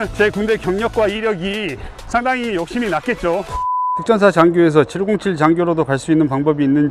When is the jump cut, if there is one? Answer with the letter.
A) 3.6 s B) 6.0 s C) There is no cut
A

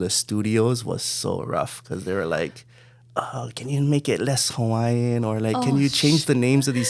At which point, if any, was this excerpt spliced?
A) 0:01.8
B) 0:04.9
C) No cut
C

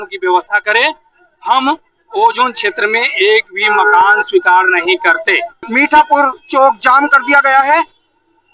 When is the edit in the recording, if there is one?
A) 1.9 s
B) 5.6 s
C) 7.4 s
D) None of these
B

